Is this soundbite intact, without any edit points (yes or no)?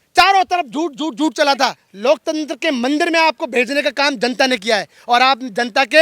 no